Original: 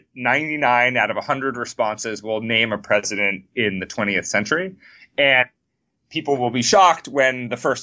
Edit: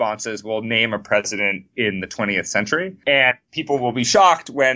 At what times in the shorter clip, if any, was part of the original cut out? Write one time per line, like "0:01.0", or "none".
0:02.9
0:03.5